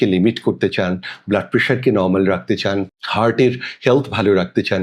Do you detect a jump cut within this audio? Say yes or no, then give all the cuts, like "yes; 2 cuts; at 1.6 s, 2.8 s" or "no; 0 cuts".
no; 0 cuts